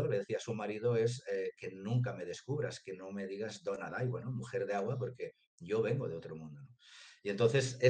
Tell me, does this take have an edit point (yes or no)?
no